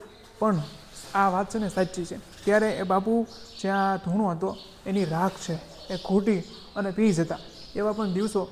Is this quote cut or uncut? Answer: uncut